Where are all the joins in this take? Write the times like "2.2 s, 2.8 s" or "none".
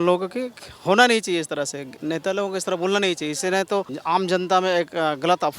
1.9 s, 3.9 s